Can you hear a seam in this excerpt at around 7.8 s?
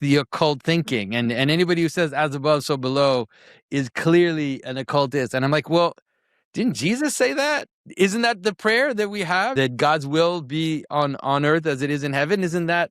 yes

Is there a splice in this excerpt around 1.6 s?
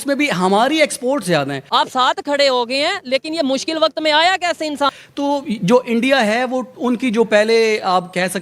yes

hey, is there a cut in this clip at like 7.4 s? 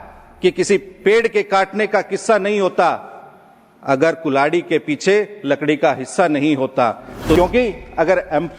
yes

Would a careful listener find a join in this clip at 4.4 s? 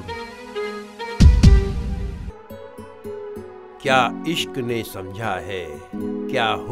no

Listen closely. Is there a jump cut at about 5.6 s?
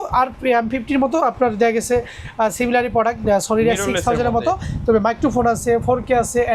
no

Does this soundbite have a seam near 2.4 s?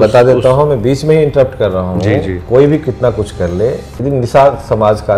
no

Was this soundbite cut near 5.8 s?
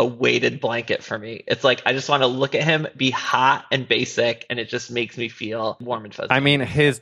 yes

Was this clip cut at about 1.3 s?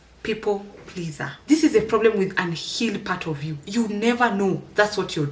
yes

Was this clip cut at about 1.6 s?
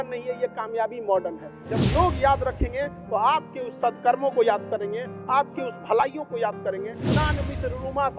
yes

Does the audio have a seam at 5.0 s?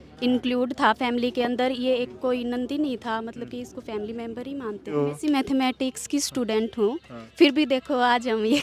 yes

